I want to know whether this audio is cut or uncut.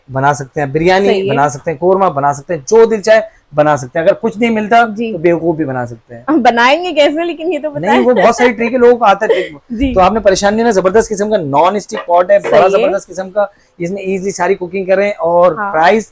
uncut